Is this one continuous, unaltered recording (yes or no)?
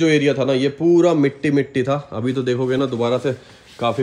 yes